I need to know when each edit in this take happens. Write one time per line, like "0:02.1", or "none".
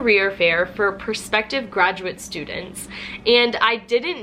none

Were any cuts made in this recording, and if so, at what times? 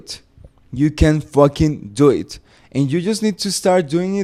none

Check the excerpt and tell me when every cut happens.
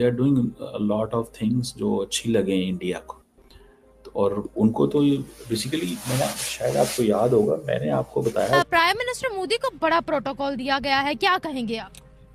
0:08.7

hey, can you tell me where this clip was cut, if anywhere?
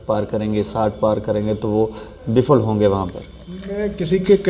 none

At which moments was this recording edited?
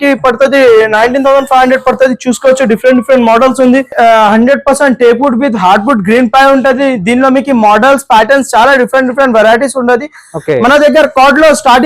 0:03.9

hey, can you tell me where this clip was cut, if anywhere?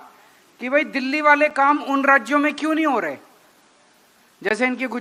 none

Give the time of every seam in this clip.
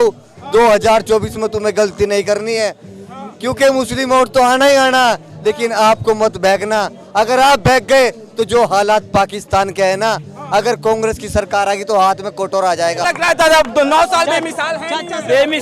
0:13.0

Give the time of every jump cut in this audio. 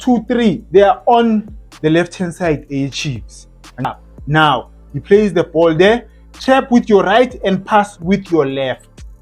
0:03.9

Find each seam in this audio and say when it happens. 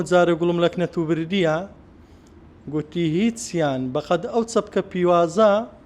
none

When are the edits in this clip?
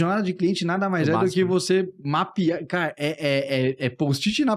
none

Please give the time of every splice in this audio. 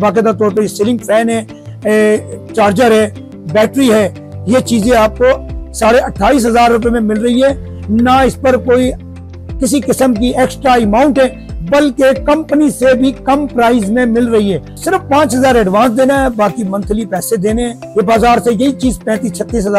0:14.7
0:17.8

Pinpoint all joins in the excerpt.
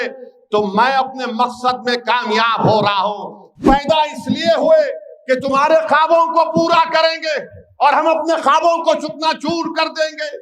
0:03.6

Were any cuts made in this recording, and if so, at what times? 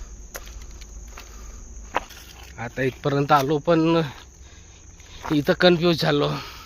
0:02.1

